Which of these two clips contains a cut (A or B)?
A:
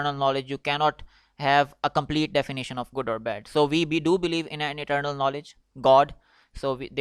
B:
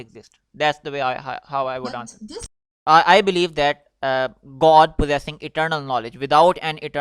B